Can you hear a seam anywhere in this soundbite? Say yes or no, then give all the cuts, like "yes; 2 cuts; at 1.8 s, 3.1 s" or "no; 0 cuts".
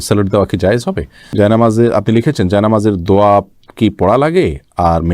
yes; 1 cut; at 1.2 s